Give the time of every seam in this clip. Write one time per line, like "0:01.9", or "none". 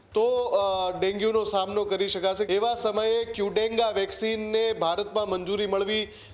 0:02.4